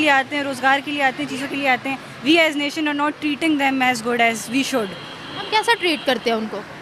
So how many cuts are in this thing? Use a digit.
1